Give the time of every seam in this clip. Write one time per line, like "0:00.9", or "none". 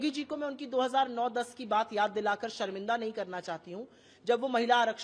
none